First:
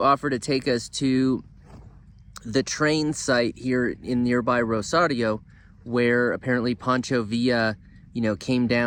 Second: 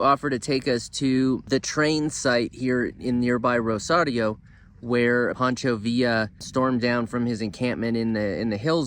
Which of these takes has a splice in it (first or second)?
second